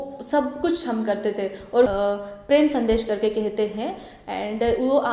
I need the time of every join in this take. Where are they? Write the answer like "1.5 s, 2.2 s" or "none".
1.9 s